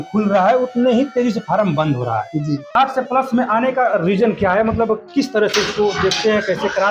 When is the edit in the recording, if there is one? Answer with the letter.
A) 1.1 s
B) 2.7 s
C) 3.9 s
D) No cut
B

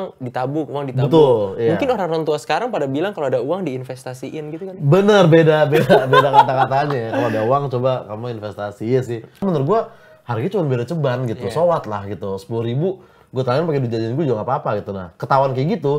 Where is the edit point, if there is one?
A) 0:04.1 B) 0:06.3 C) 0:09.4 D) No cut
C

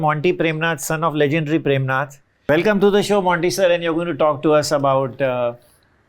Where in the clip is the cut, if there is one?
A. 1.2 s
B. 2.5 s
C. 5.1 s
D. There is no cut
B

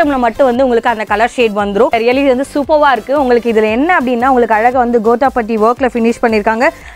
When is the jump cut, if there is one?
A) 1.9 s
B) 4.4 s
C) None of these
A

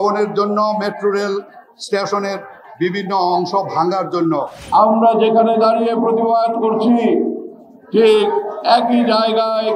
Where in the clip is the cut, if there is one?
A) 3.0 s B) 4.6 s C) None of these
B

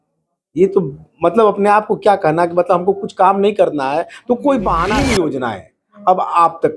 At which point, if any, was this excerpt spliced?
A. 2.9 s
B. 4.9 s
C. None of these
B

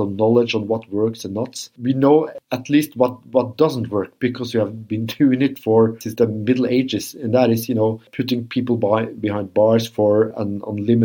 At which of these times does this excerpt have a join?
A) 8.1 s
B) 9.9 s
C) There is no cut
A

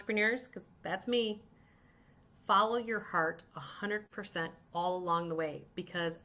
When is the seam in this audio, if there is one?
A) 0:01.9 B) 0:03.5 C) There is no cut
C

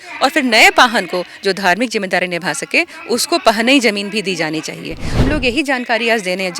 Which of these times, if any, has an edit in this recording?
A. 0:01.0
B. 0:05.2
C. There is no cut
B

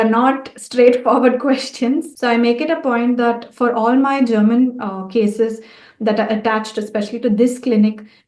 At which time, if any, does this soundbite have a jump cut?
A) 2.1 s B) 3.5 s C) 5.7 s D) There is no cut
A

